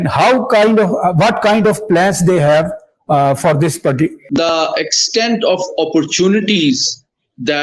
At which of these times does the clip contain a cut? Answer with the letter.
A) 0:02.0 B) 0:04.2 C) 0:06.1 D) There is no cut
B